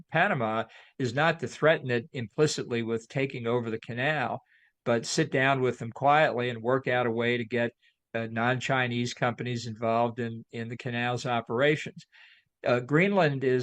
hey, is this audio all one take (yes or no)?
yes